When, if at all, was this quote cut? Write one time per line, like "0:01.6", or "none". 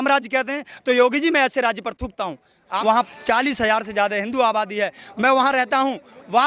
0:02.7